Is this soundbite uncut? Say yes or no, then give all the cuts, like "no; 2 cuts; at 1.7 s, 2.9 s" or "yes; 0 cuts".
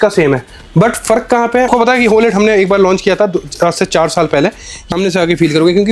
no; 2 cuts; at 1.7 s, 4.8 s